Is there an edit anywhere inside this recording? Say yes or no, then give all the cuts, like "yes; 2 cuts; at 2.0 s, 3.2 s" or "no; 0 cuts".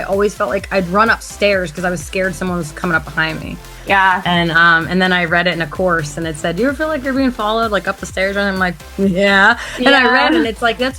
no; 0 cuts